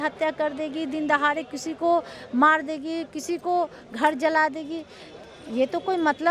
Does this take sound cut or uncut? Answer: uncut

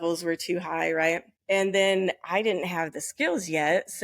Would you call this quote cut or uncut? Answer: cut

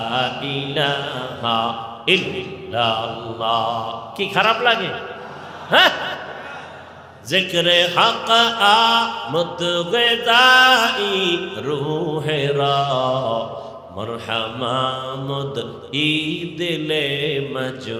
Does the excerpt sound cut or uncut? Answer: uncut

